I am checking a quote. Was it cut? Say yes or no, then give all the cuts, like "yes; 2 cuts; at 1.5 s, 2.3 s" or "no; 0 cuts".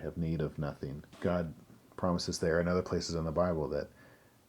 yes; 1 cut; at 1.1 s